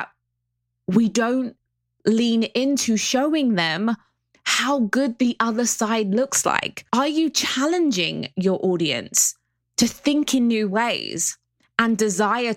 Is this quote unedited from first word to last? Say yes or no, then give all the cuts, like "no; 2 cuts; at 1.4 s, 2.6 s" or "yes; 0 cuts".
no; 1 cut; at 6.7 s